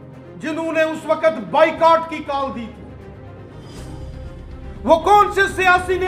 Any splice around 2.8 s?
no; 0 cuts

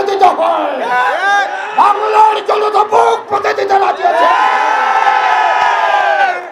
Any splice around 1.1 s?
no; 0 cuts

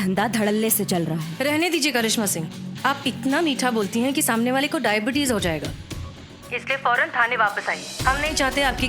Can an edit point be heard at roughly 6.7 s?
no; 1 cut; at 1.3 s

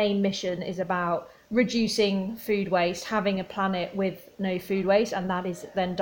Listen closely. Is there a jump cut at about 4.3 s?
no; 0 cuts

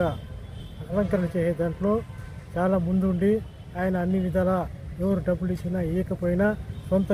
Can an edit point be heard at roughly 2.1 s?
no; 0 cuts

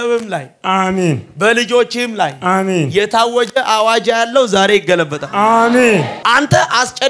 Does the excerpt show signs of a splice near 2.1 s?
no; 1 cut; at 6.1 s

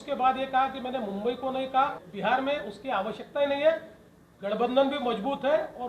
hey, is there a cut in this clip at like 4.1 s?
no; 1 cut; at 2.0 s

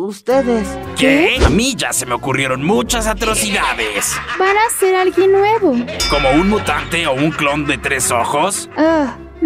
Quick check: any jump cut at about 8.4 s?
no; 1 cut; at 1.4 s

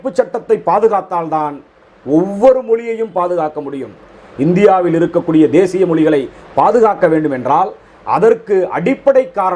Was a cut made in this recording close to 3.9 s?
no; 0 cuts

